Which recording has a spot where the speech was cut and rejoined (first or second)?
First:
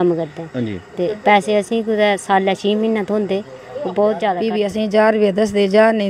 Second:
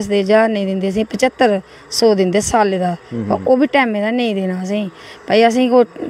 first